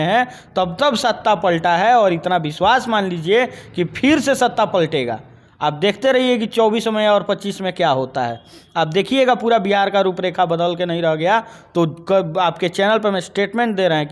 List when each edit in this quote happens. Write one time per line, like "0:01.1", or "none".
none